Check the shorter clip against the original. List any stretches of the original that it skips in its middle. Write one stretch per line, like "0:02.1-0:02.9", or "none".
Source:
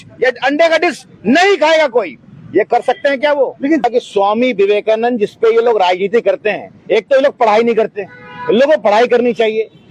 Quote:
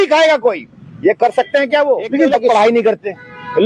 0:04.0-0:07.4